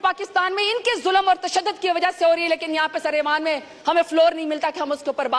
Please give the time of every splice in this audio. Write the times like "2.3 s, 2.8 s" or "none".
none